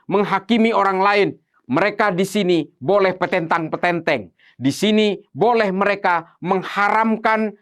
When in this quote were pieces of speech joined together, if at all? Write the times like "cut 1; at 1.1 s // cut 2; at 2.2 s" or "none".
cut 1; at 1.5 s